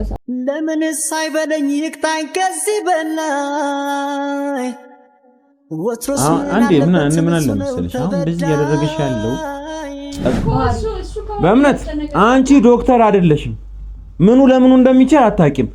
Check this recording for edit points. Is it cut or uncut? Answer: cut